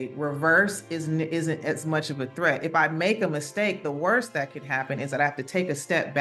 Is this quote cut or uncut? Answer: uncut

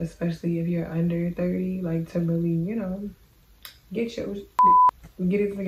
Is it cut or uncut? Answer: uncut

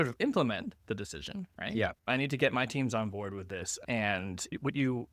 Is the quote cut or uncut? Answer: uncut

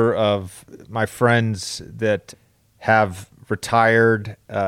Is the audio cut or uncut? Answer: cut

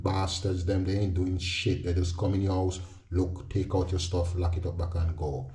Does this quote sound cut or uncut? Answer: uncut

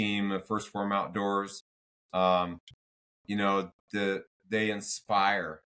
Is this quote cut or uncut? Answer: uncut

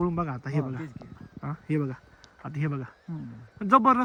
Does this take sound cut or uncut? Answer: uncut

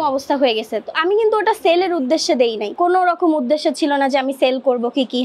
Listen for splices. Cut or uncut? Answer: uncut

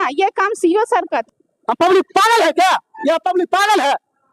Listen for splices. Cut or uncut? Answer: cut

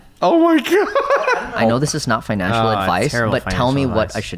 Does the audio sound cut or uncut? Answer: cut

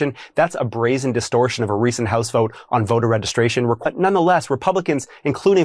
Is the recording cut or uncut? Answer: cut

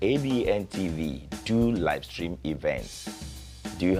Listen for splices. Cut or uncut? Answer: uncut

